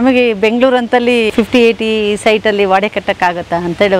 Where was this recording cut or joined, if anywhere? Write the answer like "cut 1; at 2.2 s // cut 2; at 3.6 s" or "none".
cut 1; at 1.3 s